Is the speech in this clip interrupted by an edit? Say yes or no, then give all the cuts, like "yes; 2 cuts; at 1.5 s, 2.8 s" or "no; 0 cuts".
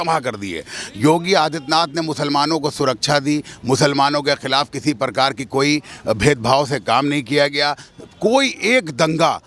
no; 0 cuts